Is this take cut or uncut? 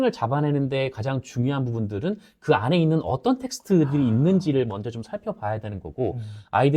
uncut